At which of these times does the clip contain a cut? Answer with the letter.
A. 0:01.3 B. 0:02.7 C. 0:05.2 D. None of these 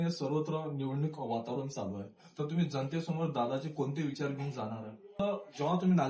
C